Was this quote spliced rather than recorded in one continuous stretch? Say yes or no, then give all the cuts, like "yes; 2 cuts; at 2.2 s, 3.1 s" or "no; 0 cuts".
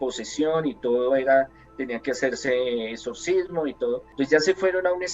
yes; 1 cut; at 4.1 s